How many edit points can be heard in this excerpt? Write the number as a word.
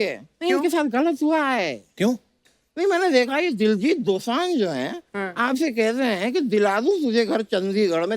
one